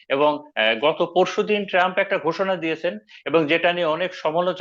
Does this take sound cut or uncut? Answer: uncut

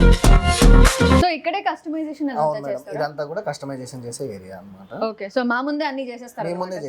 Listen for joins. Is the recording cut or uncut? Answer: cut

